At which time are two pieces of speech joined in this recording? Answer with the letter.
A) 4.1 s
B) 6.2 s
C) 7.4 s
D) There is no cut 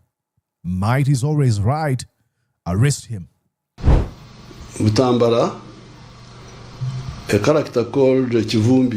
A